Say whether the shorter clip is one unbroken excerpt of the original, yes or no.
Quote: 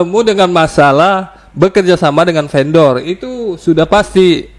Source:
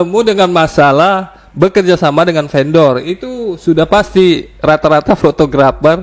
yes